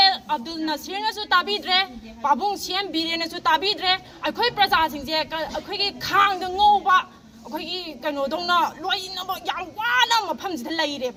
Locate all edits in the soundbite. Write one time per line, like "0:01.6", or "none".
none